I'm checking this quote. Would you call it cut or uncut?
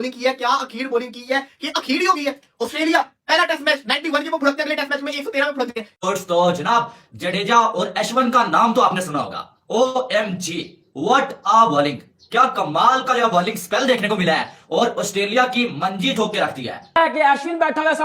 cut